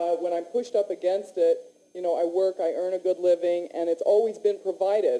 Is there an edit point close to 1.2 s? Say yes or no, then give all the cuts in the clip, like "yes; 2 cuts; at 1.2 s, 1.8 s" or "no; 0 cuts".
no; 1 cut; at 2.8 s